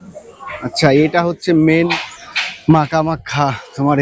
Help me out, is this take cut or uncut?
cut